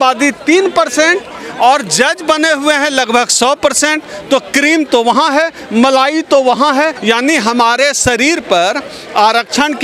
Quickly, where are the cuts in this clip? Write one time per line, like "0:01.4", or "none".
0:07.0

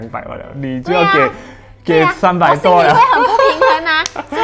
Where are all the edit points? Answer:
none

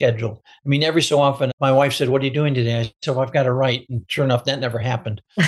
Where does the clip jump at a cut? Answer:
0:01.5

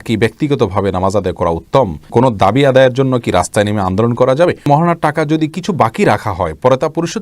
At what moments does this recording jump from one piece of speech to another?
0:02.1
0:04.7

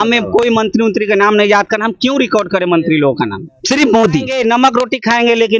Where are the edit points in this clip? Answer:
0:03.5
0:04.3

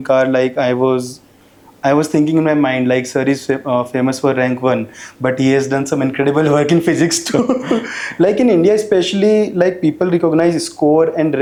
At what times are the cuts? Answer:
none

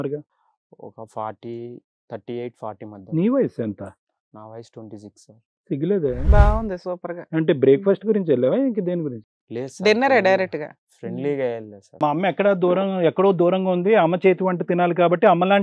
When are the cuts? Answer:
0:12.0

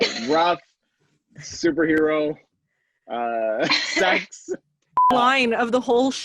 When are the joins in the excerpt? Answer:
0:05.1

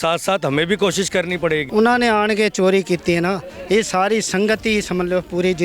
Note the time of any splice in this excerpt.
0:01.7

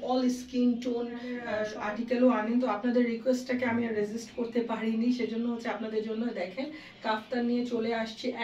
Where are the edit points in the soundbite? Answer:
0:01.6

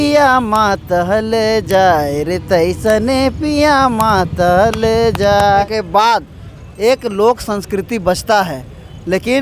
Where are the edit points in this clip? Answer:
0:05.4

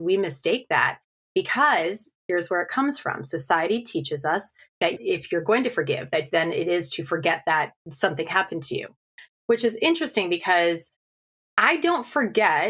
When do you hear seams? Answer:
0:04.8
0:08.9

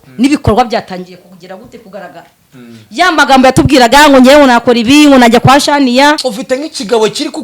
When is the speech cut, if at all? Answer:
0:06.3

